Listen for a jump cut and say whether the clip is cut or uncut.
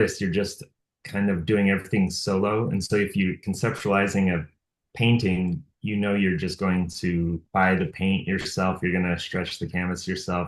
cut